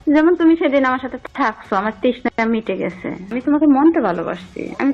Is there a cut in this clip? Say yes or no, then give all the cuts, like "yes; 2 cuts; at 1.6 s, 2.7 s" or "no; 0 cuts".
yes; 1 cut; at 3.3 s